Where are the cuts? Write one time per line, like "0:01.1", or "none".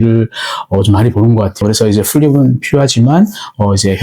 0:01.6